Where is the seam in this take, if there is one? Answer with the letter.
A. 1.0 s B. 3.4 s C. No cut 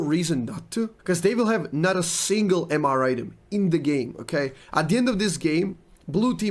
A